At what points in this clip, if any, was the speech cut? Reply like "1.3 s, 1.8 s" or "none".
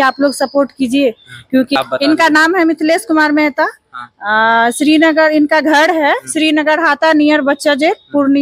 1.7 s